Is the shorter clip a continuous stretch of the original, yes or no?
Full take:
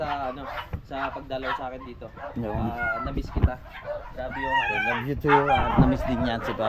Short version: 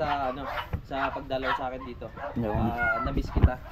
yes